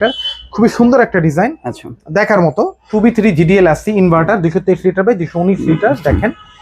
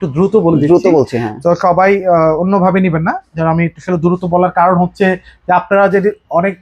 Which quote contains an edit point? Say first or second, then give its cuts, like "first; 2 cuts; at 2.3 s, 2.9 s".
first; 1 cut; at 2.8 s